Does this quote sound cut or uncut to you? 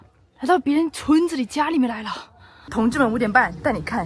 cut